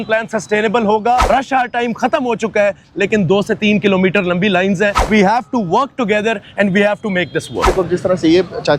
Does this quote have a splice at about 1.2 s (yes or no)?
yes